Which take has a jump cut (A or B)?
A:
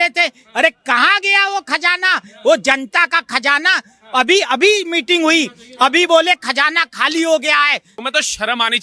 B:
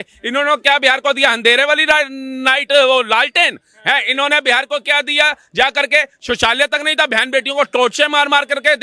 A